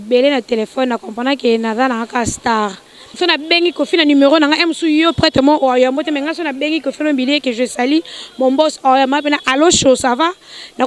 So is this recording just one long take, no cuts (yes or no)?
no